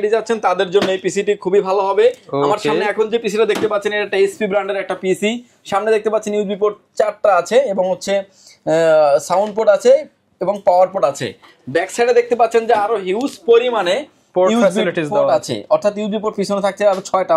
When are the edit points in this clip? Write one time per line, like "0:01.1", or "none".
none